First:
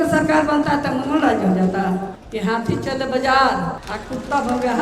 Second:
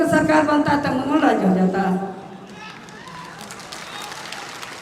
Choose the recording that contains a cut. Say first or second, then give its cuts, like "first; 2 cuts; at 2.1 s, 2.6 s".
first; 2 cuts; at 2.2 s, 3.9 s